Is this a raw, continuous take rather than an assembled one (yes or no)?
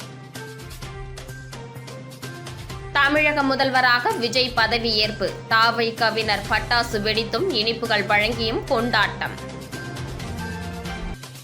yes